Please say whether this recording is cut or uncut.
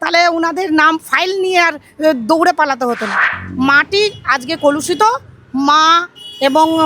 cut